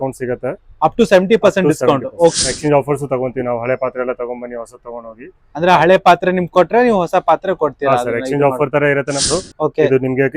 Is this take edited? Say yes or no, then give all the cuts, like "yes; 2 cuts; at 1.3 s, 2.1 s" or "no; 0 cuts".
yes; 2 cuts; at 2.4 s, 9.2 s